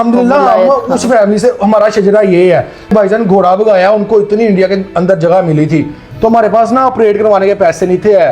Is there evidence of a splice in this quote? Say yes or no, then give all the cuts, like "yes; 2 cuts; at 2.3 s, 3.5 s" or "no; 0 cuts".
yes; 2 cuts; at 2.9 s, 6.0 s